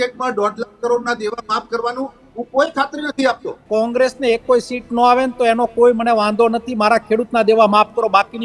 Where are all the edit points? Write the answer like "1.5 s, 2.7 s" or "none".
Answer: 3.5 s